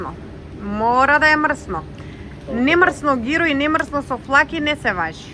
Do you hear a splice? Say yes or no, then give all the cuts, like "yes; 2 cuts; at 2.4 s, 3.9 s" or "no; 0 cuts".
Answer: no; 0 cuts